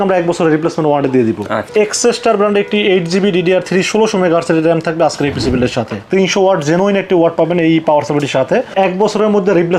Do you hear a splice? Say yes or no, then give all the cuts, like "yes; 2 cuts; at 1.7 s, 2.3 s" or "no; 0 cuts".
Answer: yes; 3 cuts; at 1.7 s, 6.0 s, 8.7 s